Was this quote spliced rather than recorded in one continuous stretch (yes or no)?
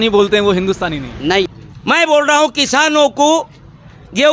yes